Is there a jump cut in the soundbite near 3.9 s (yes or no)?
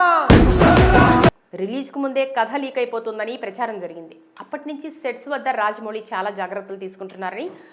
no